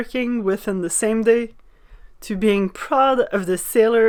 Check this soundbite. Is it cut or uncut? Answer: uncut